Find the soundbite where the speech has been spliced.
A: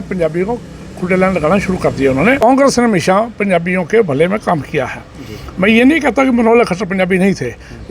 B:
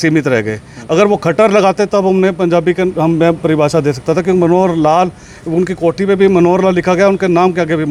A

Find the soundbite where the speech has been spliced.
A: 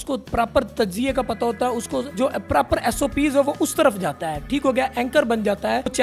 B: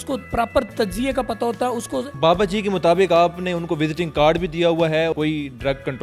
B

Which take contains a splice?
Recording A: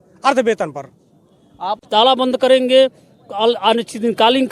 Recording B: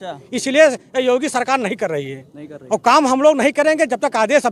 A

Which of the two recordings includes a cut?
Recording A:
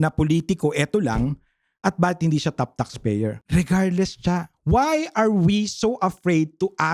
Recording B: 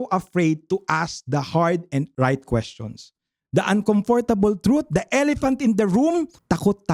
A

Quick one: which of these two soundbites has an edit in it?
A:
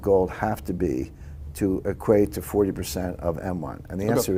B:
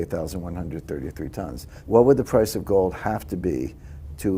B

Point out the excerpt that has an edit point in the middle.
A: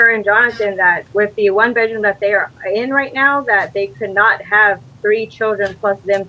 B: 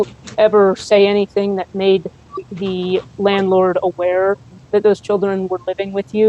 A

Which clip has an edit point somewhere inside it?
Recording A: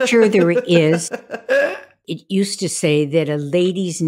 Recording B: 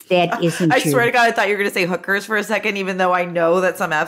A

